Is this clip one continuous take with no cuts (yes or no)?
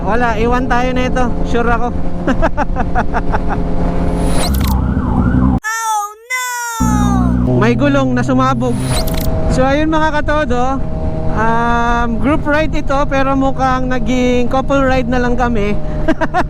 no